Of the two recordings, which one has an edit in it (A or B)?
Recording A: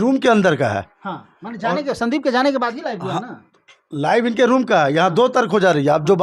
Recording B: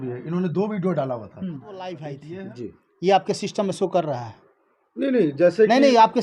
B